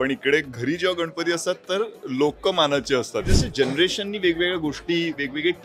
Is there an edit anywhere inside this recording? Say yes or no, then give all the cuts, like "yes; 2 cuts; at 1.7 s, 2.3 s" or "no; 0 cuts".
yes; 1 cut; at 3.3 s